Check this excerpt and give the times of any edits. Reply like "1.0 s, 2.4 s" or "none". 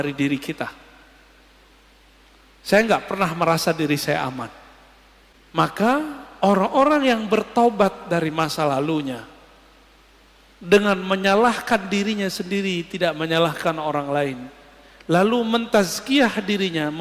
5.4 s